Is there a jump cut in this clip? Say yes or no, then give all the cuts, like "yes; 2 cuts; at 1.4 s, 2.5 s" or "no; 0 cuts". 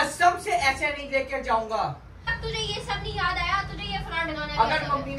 yes; 1 cut; at 2.4 s